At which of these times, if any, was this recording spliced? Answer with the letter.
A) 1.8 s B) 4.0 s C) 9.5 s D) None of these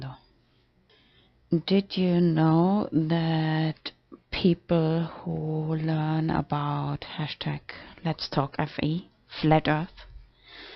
A